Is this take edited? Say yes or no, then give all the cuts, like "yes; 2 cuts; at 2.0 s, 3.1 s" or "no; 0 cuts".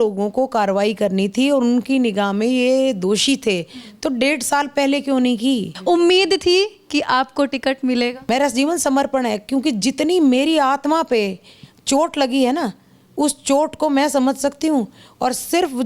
yes; 2 cuts; at 5.7 s, 8.2 s